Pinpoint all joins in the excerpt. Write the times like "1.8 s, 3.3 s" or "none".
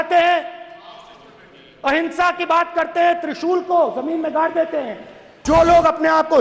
5.4 s